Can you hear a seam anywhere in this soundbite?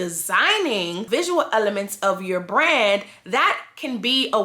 no; 0 cuts

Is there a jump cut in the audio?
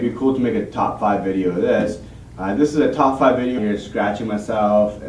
no; 0 cuts

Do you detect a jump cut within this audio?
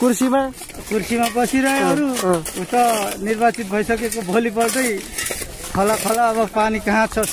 no; 0 cuts

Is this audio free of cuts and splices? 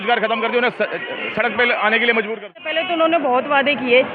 no; 1 cut; at 2.8 s

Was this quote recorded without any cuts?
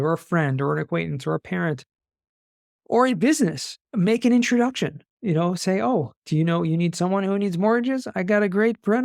yes; 0 cuts

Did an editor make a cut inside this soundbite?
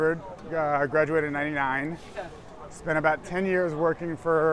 no; 0 cuts

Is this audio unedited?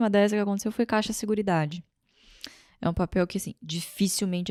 yes; 0 cuts

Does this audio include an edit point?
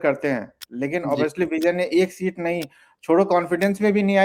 no; 0 cuts

